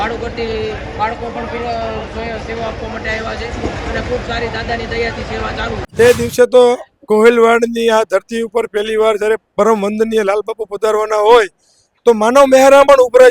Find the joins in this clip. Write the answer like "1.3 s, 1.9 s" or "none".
5.8 s